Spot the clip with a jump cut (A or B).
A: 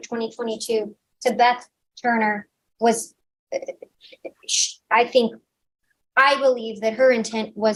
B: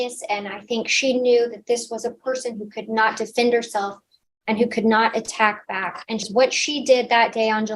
B